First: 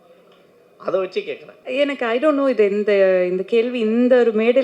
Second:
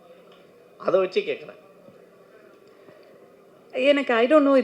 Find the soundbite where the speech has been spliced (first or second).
first